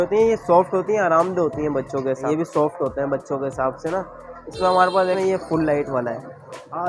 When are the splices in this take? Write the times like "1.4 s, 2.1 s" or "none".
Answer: 2.2 s, 5.2 s